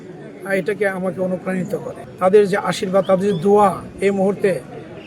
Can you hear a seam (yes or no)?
yes